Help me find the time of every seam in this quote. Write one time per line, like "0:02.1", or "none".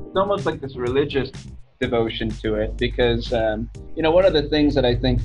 none